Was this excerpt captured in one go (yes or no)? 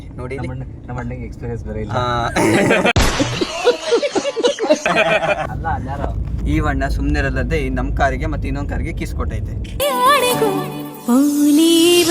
no